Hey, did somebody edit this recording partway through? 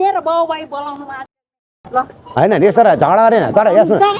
no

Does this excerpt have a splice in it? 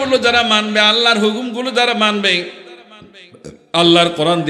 no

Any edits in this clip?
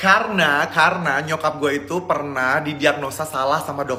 no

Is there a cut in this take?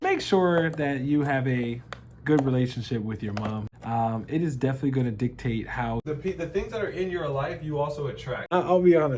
yes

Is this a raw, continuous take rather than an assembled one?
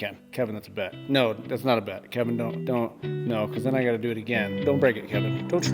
yes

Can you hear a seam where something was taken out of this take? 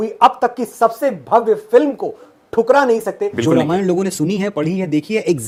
no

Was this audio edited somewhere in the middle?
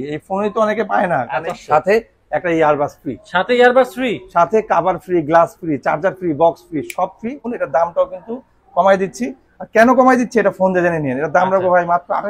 yes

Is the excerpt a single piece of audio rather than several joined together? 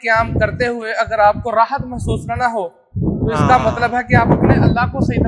yes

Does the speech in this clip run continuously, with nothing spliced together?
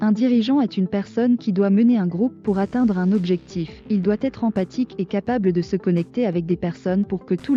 yes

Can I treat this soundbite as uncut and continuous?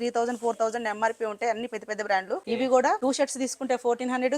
no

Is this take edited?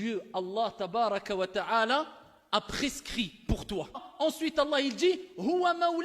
yes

